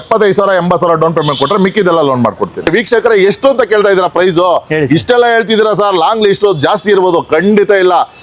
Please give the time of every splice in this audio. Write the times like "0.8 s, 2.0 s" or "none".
2.7 s

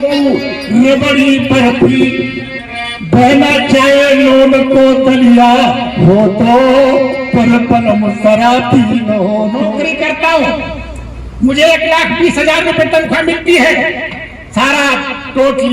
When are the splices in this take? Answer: 9.7 s

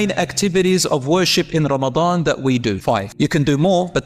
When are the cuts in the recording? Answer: 3.1 s

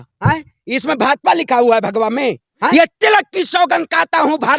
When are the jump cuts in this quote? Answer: 2.7 s

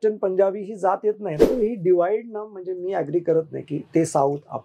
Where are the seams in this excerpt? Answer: 1.5 s

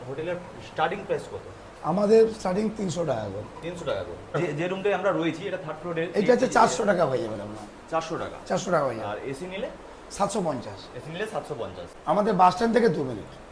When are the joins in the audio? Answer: 4.4 s, 11.9 s

